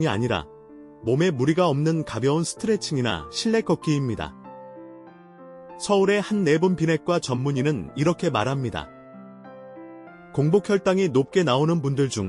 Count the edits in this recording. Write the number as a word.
two